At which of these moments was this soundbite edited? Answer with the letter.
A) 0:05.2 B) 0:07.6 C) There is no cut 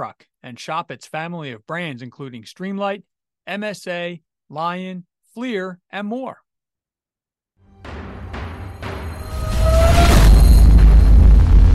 B